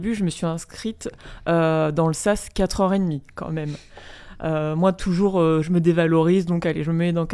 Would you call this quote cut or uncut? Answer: uncut